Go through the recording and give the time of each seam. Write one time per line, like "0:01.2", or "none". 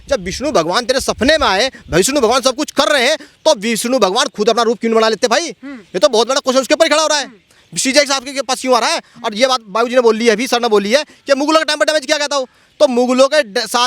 none